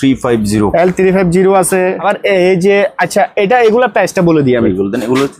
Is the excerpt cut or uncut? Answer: cut